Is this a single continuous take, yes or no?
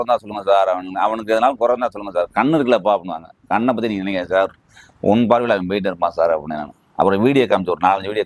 yes